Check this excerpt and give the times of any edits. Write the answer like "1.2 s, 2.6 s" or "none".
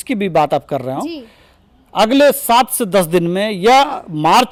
none